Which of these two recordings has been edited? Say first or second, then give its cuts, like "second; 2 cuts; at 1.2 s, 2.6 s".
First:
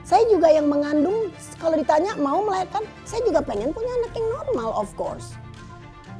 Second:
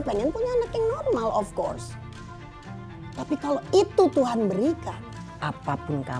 second; 1 cut; at 5.2 s